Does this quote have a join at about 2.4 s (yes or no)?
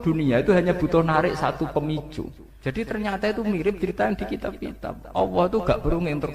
yes